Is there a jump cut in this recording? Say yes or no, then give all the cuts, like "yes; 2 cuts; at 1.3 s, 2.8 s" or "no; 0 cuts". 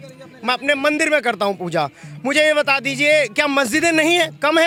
no; 0 cuts